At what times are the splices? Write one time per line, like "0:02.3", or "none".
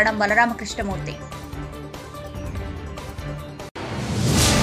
0:01.1
0:03.6